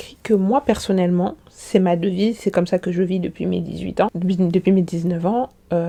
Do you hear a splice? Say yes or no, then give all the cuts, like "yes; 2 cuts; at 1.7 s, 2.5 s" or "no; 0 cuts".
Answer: no; 0 cuts